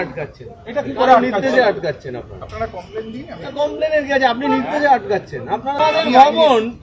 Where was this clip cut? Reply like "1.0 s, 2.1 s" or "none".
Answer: 5.8 s